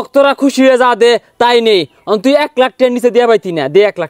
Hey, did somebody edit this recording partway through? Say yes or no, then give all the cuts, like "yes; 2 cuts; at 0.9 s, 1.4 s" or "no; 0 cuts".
no; 0 cuts